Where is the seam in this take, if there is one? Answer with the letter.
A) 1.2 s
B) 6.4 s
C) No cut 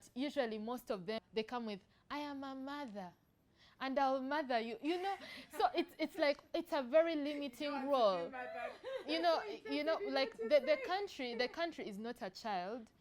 A